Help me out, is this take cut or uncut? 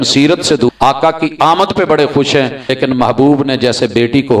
cut